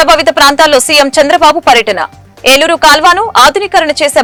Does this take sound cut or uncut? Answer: uncut